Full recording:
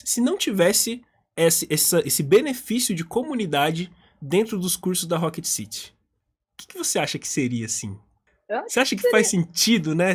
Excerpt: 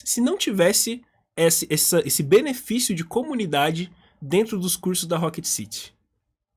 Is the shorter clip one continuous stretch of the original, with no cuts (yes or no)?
yes